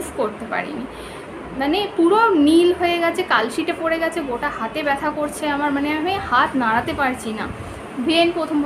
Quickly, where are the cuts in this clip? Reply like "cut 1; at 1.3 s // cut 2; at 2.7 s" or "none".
none